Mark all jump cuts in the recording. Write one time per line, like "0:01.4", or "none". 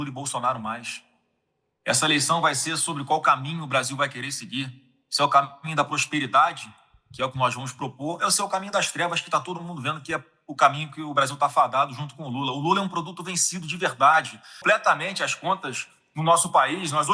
0:14.6